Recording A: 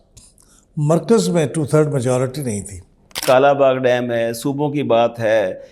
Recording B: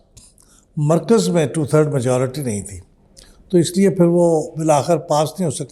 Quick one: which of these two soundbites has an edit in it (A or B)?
A